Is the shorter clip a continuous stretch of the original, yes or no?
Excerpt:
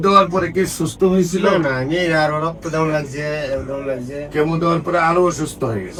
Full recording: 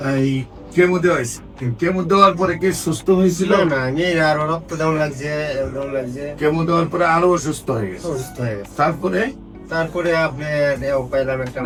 yes